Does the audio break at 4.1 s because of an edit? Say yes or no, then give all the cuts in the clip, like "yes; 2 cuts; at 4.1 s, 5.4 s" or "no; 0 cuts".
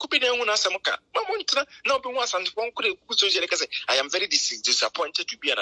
no; 0 cuts